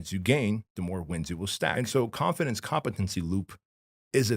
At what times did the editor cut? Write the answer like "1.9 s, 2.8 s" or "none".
1.7 s